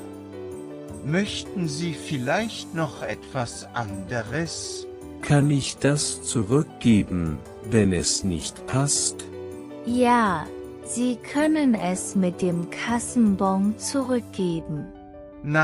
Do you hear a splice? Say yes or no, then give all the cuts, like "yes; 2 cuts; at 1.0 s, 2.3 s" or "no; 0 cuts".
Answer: no; 0 cuts